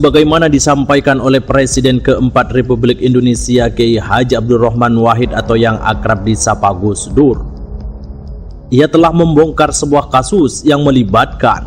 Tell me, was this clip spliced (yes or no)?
no